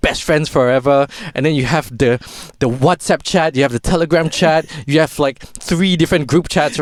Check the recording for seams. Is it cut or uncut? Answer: uncut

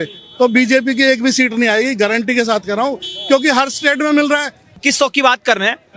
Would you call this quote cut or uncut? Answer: cut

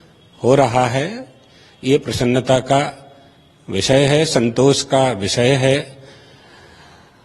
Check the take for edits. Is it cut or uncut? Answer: uncut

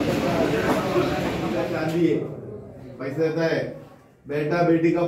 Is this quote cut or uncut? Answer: cut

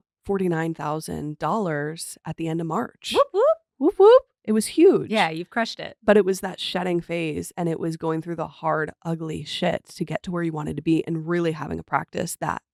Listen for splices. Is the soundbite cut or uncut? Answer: uncut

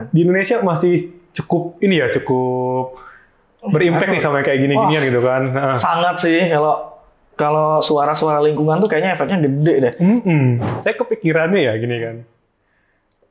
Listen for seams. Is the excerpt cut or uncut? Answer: cut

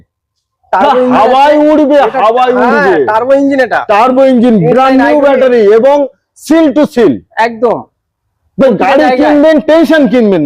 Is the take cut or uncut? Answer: uncut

